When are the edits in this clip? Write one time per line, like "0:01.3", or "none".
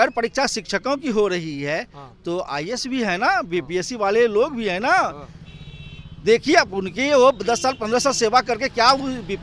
none

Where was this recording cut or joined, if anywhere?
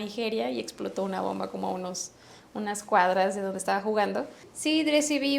0:04.4

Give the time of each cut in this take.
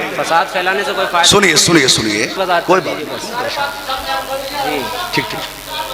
0:02.4

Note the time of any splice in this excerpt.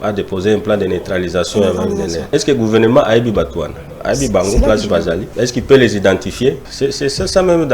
0:02.3
0:05.3
0:06.7

